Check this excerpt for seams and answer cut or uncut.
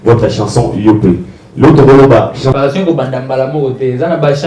cut